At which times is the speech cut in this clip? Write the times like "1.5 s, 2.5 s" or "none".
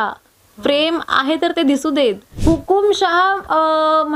2.3 s